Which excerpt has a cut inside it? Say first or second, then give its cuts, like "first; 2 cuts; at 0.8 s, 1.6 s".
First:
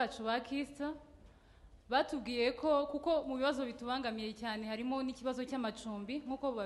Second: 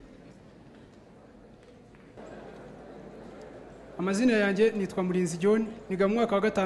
second; 1 cut; at 2.2 s